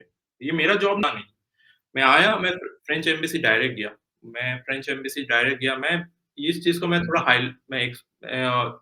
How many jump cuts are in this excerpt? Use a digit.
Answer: 1